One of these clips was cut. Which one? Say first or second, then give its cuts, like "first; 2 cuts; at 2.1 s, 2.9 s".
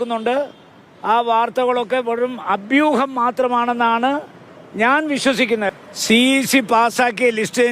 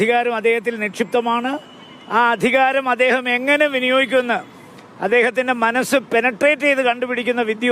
first; 1 cut; at 5.7 s